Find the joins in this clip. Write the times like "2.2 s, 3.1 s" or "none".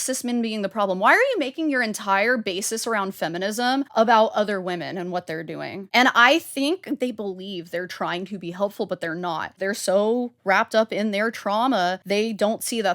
3.9 s, 5.8 s, 7.0 s, 9.6 s, 12.0 s